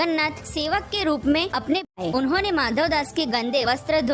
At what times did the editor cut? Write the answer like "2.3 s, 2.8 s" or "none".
1.8 s